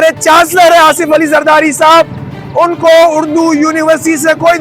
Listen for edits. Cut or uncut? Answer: uncut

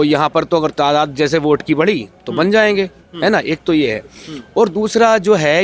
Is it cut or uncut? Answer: uncut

